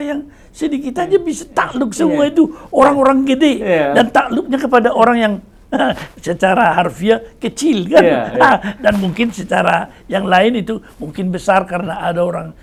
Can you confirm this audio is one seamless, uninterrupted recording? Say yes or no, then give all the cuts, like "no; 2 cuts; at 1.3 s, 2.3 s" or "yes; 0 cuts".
yes; 0 cuts